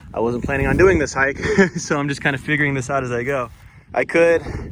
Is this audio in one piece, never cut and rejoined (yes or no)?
yes